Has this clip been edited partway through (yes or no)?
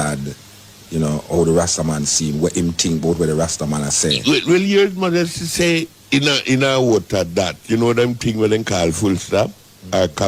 yes